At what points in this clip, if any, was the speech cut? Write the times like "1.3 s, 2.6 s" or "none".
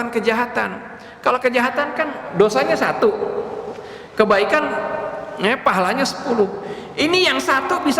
2.3 s

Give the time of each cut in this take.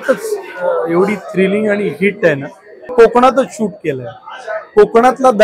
2.9 s

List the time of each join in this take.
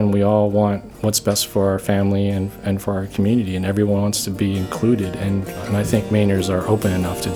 5.6 s

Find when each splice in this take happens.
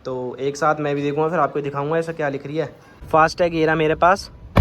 2.9 s

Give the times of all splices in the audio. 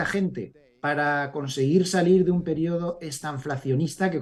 none

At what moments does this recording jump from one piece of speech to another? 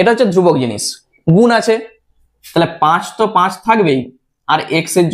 none

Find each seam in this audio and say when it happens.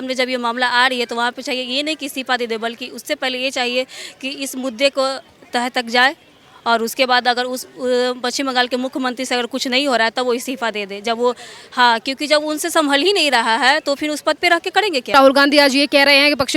15.1 s

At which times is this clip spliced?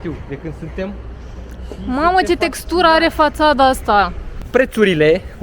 4.3 s

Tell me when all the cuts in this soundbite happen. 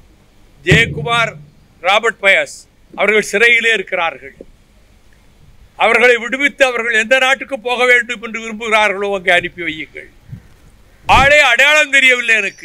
11.1 s

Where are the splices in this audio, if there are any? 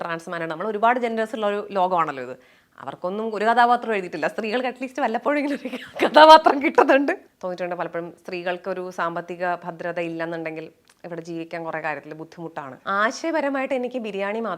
7.3 s, 12.7 s

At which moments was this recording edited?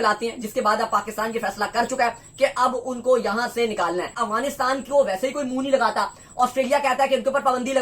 4.2 s

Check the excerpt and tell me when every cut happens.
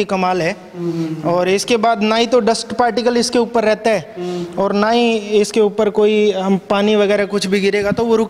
none

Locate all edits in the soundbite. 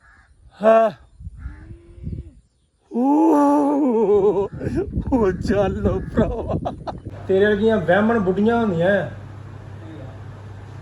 6.9 s

